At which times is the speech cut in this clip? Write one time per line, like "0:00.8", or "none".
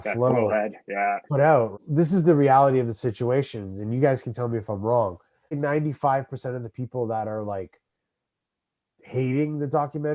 0:01.8
0:05.6